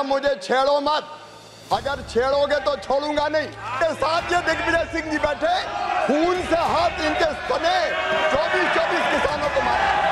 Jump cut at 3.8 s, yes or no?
yes